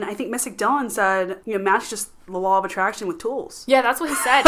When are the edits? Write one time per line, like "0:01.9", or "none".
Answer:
0:01.4